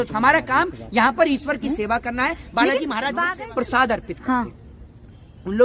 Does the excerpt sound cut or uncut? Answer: cut